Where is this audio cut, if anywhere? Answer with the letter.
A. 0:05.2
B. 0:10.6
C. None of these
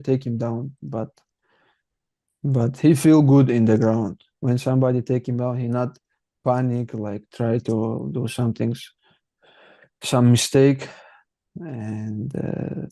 C